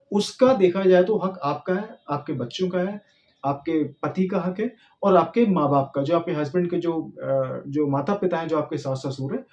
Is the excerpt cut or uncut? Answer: uncut